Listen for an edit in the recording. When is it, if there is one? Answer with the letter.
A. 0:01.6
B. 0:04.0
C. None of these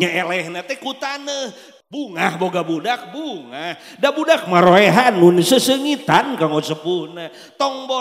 A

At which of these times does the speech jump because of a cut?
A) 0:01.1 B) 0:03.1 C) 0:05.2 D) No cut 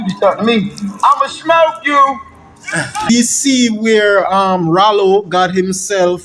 B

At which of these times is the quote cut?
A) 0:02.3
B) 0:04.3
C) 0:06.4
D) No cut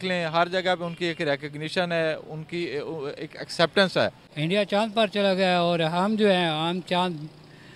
B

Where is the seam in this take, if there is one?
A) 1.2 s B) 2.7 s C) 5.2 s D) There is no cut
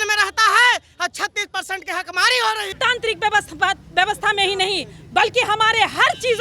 B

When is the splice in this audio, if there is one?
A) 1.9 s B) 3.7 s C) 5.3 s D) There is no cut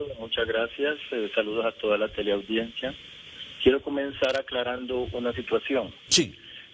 A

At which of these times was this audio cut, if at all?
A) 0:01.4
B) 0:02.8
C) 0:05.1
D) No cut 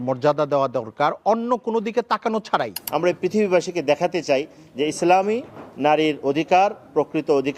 B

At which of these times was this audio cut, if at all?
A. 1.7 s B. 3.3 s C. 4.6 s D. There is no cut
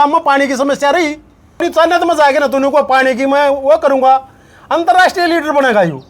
A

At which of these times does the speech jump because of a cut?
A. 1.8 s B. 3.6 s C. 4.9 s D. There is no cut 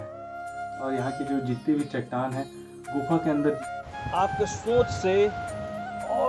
B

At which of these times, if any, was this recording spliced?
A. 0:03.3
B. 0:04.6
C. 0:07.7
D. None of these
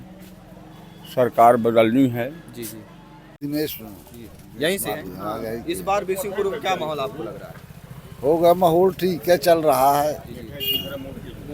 A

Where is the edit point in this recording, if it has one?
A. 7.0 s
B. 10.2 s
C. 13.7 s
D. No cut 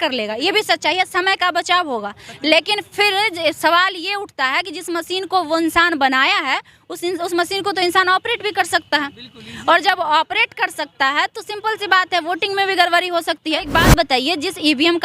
C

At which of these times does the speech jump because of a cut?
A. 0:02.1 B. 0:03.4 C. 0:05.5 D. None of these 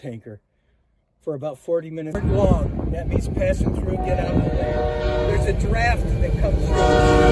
A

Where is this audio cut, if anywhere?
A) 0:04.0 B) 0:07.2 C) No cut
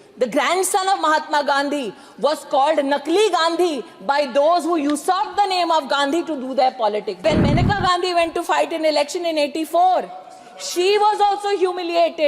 B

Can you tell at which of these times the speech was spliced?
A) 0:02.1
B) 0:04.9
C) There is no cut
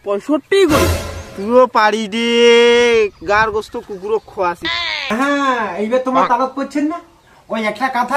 B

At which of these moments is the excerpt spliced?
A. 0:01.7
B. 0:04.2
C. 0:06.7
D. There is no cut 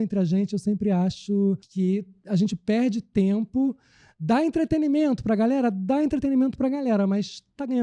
A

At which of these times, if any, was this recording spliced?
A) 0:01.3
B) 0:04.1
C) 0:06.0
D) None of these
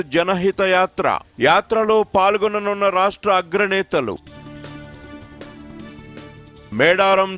D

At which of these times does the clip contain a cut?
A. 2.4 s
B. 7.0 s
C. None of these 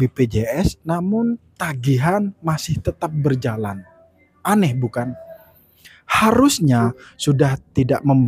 B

